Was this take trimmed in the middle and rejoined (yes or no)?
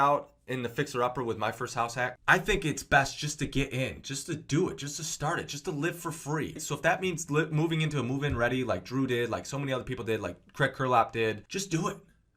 yes